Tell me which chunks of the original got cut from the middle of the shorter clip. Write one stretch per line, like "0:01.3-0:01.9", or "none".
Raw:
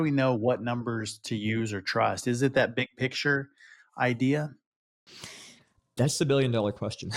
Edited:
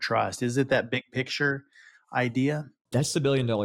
0:04.6-0:05.8